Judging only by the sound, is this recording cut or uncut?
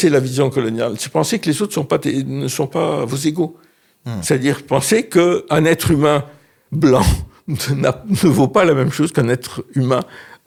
uncut